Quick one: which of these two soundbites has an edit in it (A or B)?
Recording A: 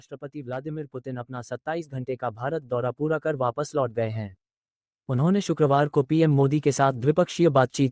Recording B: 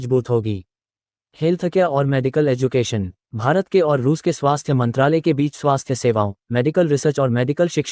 B